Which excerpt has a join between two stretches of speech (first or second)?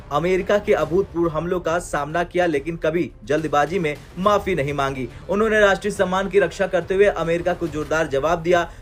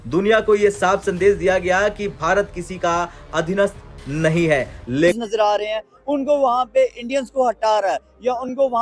second